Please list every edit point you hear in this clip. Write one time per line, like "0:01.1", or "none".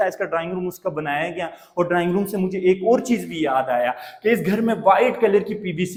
none